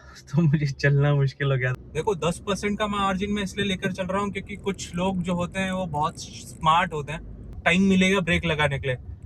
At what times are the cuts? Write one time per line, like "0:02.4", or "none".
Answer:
0:01.7
0:07.6